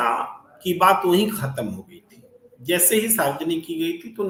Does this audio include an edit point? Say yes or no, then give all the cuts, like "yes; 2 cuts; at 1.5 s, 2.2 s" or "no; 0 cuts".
no; 0 cuts